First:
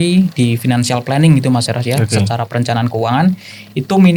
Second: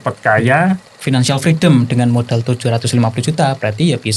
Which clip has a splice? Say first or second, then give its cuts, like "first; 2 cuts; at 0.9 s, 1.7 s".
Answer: second; 1 cut; at 0.9 s